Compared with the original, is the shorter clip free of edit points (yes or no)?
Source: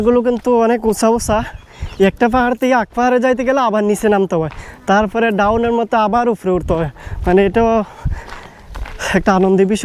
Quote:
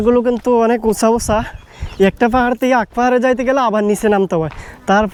yes